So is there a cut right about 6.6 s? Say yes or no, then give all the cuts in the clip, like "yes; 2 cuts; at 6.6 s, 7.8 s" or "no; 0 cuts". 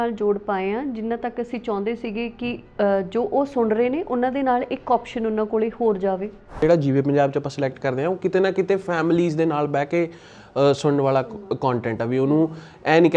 yes; 1 cut; at 6.6 s